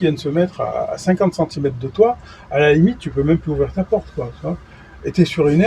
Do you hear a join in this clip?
no; 0 cuts

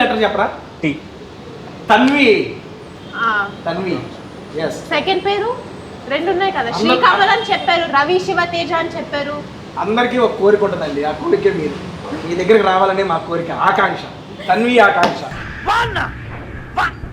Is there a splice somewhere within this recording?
no; 0 cuts

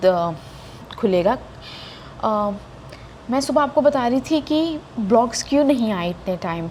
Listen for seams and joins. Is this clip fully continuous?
yes; 0 cuts

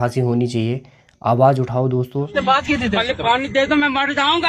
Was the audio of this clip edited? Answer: yes; 1 cut; at 2.3 s

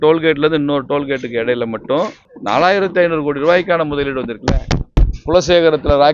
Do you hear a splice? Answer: yes; 2 cuts; at 2.3 s, 4.9 s

